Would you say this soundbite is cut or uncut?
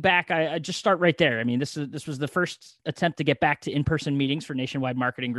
cut